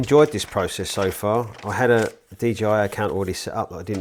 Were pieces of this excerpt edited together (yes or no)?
no